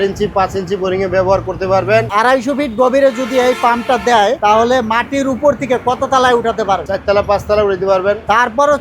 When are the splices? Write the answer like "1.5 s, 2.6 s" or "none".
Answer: 2.1 s, 4.4 s, 6.9 s